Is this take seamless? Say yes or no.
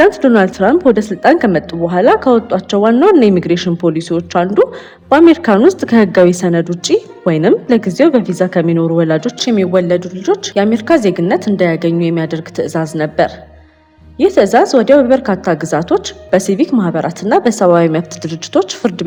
yes